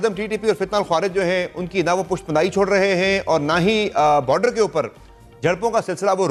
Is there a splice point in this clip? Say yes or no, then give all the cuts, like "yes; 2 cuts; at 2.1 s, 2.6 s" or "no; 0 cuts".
no; 0 cuts